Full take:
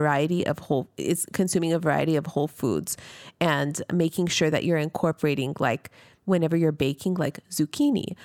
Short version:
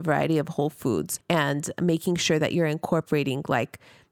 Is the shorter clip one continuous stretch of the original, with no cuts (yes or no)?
no